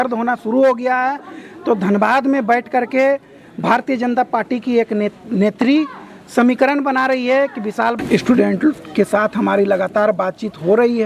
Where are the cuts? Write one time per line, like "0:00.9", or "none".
0:08.0